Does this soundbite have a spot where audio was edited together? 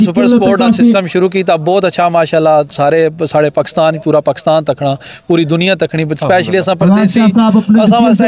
no; 0 cuts

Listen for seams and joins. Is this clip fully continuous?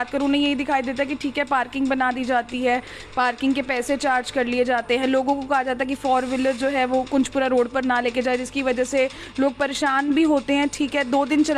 yes; 0 cuts

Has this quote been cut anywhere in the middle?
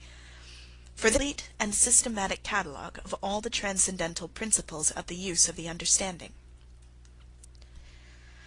no; 0 cuts

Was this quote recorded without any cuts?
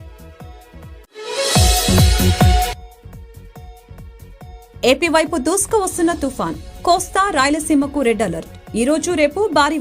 no; 1 cut; at 4.7 s

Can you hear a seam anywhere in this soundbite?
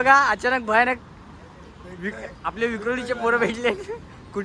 no; 0 cuts

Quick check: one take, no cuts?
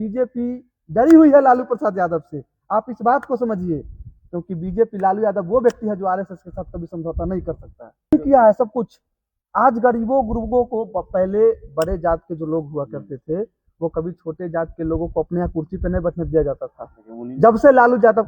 no; 1 cut; at 8.1 s

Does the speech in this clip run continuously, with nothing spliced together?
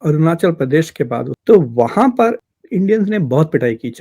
no; 2 cuts; at 1.3 s, 2.4 s

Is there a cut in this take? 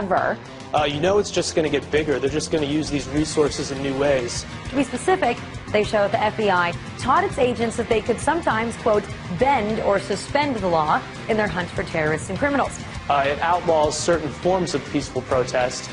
no; 0 cuts

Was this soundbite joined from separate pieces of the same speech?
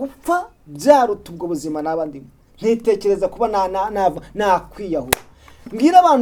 no; 0 cuts

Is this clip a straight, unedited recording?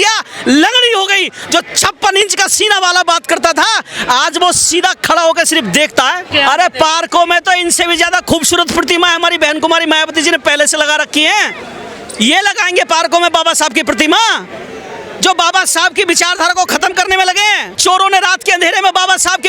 no; 2 cuts; at 6.3 s, 17.7 s

